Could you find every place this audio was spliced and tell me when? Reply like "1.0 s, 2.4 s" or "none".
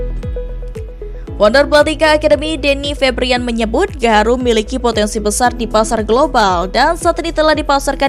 1.3 s